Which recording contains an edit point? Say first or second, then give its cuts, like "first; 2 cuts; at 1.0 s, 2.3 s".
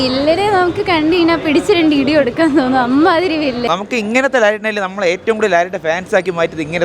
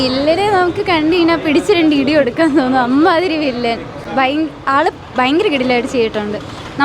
first; 1 cut; at 3.6 s